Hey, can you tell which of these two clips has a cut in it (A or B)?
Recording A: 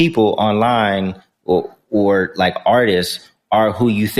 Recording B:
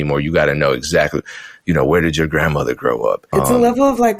B